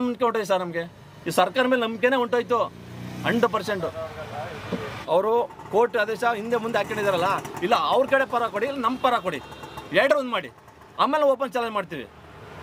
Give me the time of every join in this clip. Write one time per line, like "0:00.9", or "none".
0:04.9